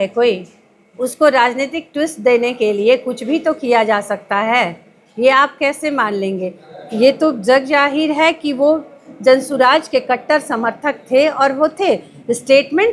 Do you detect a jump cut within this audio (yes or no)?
no